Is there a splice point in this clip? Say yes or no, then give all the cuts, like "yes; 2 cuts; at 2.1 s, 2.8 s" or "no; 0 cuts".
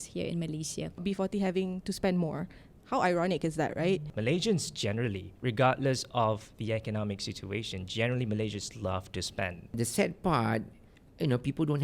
yes; 3 cuts; at 1.0 s, 4.1 s, 9.7 s